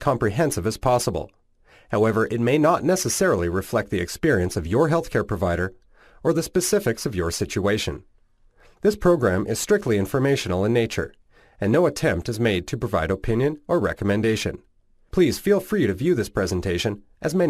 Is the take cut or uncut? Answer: cut